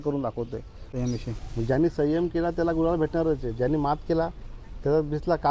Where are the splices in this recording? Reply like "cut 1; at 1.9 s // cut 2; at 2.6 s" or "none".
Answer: cut 1; at 0.9 s

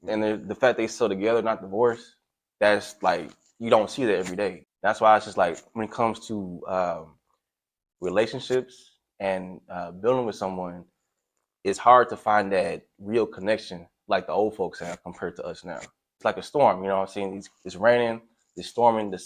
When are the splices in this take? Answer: cut 1; at 4.7 s // cut 2; at 16.1 s

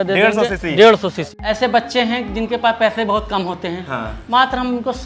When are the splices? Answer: cut 1; at 1.3 s

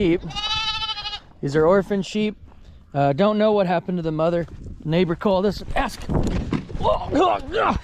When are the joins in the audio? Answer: none

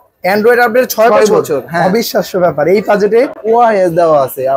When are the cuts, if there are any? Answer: cut 1; at 3.4 s

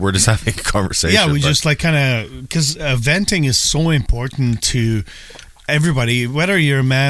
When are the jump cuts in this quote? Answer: none

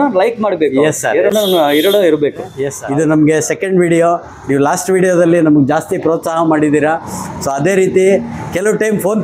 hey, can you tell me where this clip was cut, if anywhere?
none

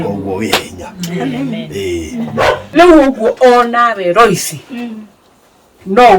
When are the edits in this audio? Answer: cut 1; at 2.7 s

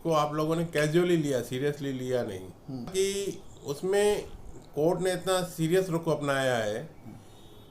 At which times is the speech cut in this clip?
cut 1; at 2.9 s

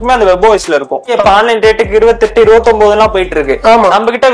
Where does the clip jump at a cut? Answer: cut 1; at 1.1 s

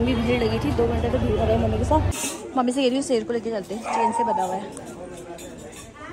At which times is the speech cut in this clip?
cut 1; at 2.2 s

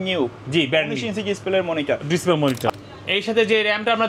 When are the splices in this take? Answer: cut 1; at 2.7 s

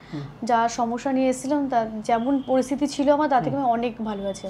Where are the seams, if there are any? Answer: none

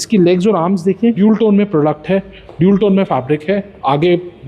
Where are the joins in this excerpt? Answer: cut 1; at 1.2 s

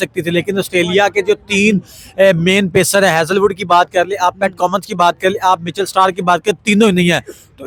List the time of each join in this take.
none

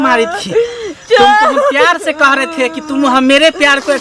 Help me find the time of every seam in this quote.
none

